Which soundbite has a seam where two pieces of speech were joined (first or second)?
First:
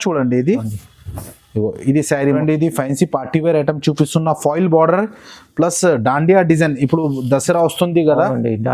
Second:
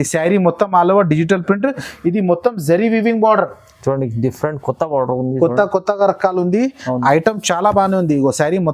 first